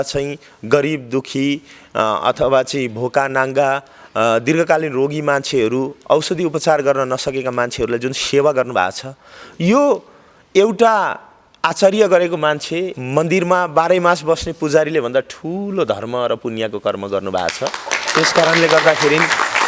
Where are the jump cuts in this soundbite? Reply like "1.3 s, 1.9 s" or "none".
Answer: none